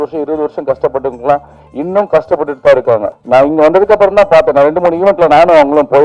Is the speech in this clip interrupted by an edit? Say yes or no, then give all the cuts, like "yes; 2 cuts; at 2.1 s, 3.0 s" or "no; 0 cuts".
yes; 1 cut; at 3.2 s